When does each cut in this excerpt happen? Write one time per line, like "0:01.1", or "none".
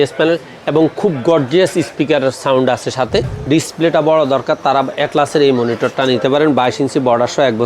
0:03.3